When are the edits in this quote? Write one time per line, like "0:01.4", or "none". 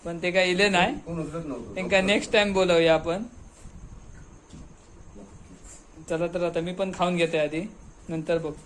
none